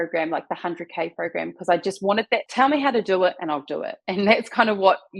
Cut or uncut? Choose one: cut